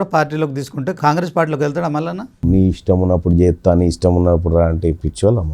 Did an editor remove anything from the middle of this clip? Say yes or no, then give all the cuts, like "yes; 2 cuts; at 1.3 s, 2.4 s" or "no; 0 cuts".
yes; 2 cuts; at 1.0 s, 2.4 s